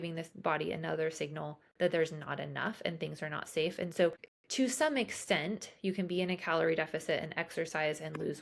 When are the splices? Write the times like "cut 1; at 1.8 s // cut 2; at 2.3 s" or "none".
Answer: cut 1; at 4.2 s